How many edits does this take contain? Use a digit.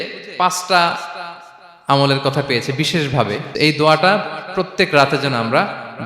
1